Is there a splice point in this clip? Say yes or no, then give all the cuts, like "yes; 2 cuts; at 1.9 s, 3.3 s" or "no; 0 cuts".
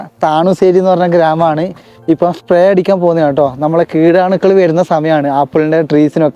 no; 0 cuts